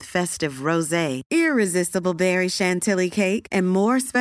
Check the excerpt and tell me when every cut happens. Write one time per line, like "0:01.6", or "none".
none